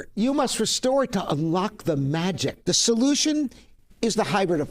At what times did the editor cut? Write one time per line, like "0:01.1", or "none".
0:02.6